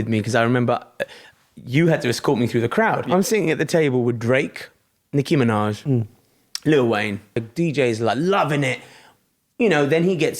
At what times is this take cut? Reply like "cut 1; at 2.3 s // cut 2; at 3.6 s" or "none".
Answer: cut 1; at 3.0 s // cut 2; at 7.5 s